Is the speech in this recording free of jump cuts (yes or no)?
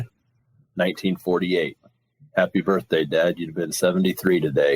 yes